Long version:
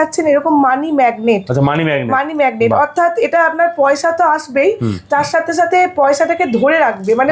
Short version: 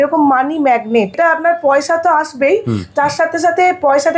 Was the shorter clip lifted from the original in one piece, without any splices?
no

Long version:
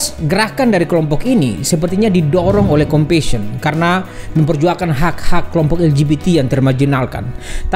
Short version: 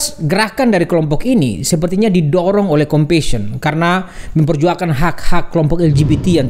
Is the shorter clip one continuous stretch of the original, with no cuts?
yes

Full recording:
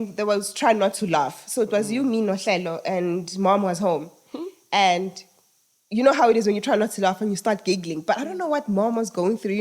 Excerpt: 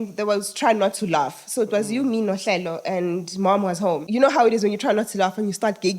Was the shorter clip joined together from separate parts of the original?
yes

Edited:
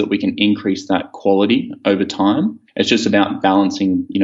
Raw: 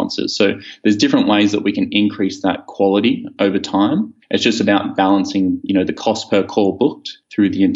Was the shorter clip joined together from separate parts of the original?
no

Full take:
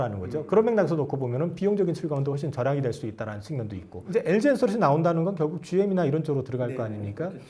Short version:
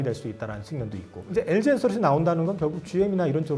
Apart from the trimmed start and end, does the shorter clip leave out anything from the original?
no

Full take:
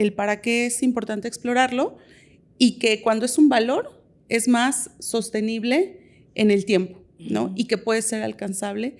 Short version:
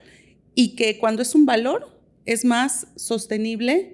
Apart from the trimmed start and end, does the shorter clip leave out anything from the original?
no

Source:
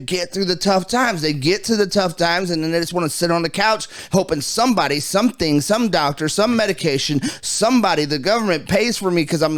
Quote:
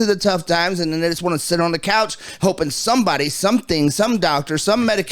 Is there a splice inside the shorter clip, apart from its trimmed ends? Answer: no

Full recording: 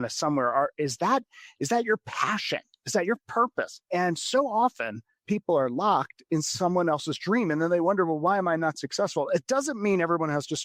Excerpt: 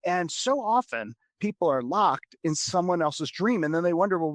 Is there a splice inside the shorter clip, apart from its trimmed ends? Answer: no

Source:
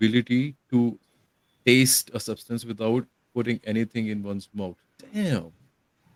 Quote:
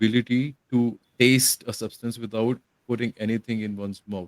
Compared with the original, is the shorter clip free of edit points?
no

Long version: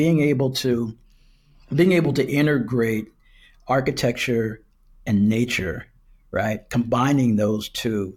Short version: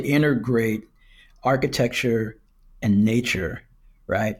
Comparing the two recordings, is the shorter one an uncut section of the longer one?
yes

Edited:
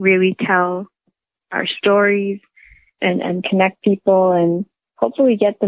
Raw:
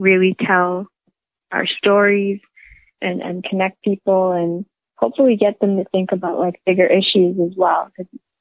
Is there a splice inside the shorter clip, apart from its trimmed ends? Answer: no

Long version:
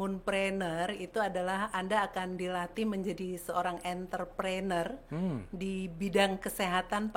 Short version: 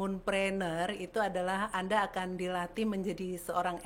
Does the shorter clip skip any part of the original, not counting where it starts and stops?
no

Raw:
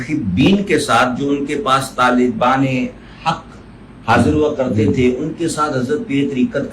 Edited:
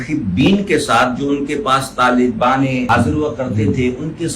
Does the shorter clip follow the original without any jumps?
no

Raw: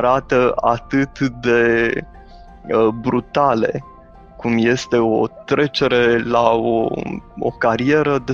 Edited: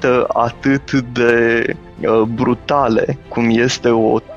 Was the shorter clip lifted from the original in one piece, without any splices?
no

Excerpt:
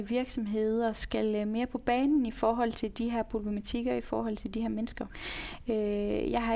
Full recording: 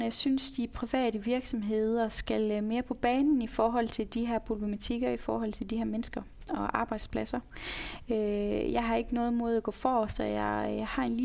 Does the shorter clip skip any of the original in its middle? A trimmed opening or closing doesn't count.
yes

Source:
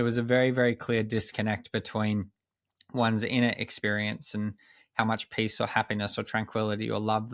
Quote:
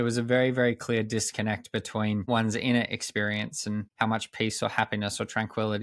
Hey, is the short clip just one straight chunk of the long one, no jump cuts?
no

